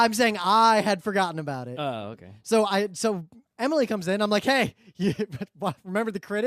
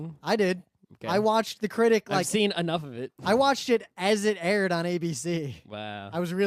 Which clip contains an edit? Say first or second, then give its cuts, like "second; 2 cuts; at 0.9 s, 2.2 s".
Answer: first; 1 cut; at 4.0 s